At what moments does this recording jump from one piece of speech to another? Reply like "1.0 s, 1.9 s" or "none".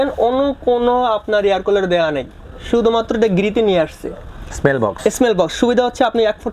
none

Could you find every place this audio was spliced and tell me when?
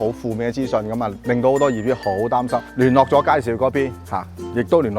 2.7 s

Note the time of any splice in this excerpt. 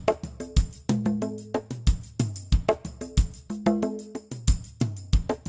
4.3 s

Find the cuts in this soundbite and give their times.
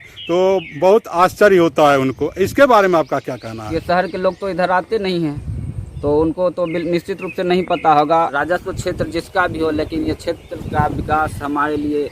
3.4 s, 8.3 s

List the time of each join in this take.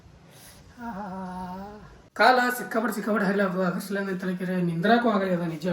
2.0 s

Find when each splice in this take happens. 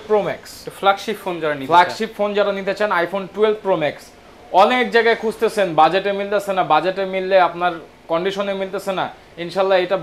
none

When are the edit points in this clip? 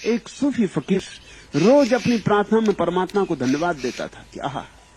1.0 s

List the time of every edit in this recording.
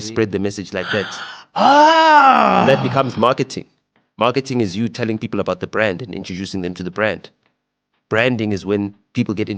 none

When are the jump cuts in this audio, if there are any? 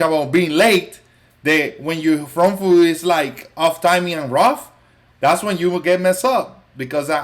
none

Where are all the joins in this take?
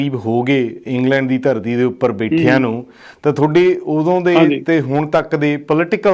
none

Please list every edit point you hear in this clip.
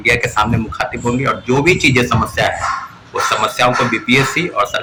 none

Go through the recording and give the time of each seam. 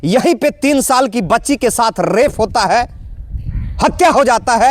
none

